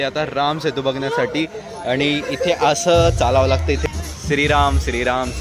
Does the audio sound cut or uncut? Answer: cut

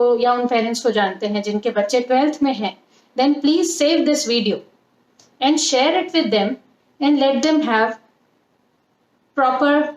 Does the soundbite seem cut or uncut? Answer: uncut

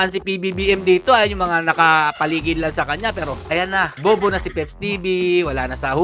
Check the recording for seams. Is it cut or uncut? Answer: cut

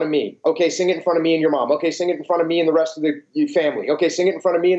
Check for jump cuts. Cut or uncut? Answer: uncut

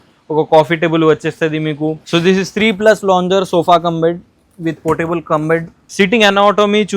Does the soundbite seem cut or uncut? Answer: cut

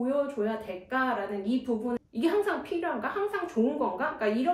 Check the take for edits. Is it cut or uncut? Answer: cut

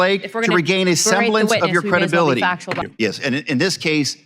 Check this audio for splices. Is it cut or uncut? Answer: cut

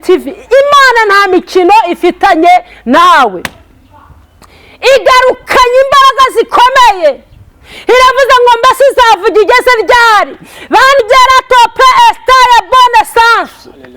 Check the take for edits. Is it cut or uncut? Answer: cut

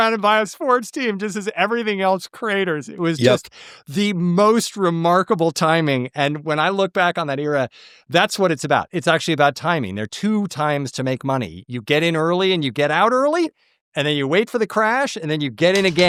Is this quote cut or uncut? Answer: uncut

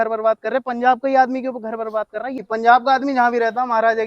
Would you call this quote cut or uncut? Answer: cut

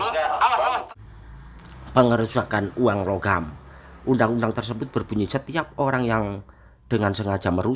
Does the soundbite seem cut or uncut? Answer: cut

